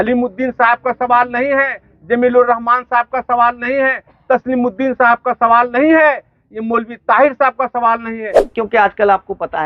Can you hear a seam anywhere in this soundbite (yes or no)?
yes